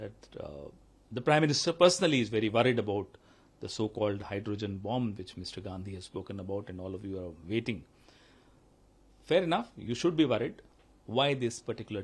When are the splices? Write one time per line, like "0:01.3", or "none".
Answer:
0:10.7